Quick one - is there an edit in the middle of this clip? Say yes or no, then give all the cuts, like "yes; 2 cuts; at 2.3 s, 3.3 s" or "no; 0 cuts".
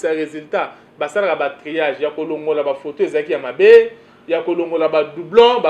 no; 0 cuts